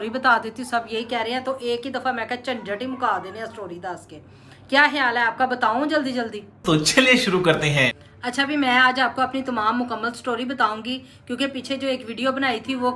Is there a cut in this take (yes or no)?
no